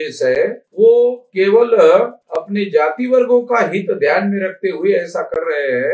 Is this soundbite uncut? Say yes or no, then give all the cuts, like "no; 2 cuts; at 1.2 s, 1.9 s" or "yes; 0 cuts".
yes; 0 cuts